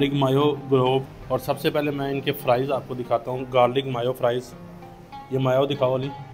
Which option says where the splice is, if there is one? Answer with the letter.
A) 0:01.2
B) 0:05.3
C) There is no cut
A